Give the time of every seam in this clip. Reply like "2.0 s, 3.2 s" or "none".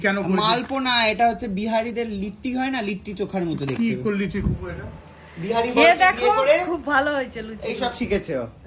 none